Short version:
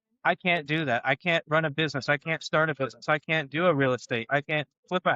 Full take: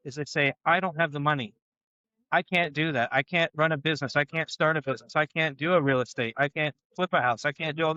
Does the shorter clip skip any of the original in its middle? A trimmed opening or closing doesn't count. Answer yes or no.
no